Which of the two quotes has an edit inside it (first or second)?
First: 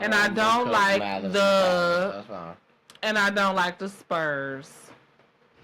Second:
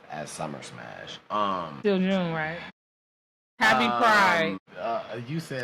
second